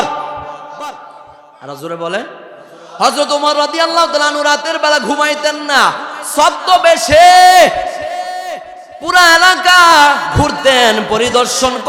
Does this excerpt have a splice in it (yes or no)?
no